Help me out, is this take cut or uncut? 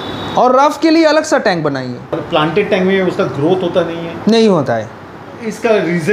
cut